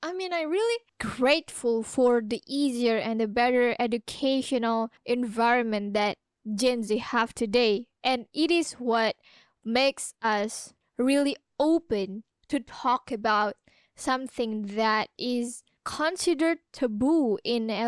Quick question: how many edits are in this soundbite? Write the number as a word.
two